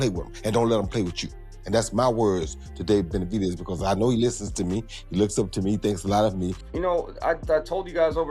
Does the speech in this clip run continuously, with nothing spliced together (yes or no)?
no